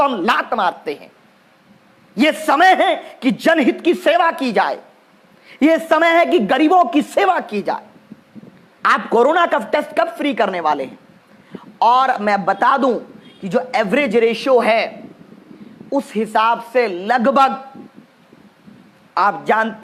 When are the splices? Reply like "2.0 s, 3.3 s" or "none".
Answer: none